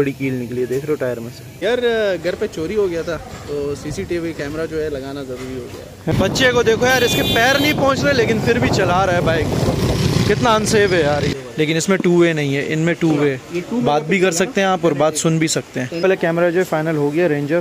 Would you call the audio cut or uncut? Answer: cut